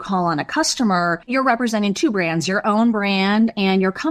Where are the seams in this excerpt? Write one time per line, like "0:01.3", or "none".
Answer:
0:01.3